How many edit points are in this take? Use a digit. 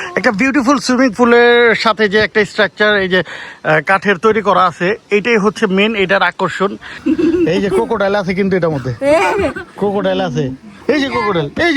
1